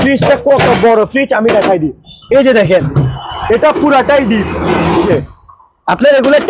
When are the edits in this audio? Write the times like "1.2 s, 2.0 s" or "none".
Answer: 5.1 s